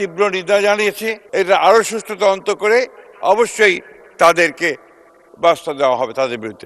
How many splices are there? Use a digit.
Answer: 1